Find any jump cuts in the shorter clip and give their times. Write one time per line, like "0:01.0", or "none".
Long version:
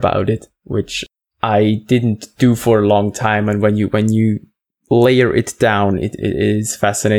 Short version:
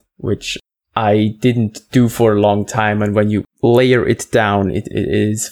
0:03.4